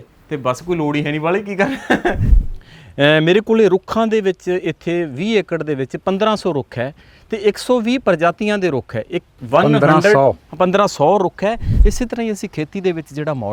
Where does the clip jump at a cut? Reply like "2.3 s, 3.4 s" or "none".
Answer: 2.3 s, 11.7 s